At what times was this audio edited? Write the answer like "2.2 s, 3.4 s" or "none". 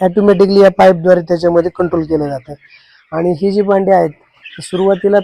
none